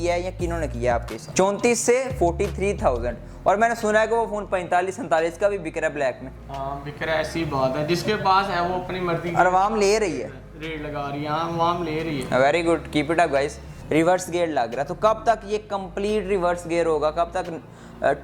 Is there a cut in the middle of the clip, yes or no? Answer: yes